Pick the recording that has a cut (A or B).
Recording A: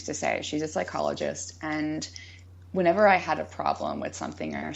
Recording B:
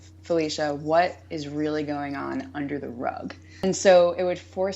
B